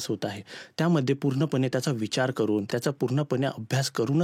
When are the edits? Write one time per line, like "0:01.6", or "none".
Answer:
0:02.7